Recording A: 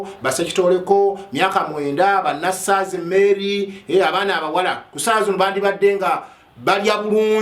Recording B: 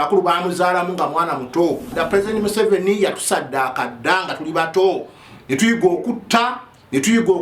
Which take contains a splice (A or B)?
B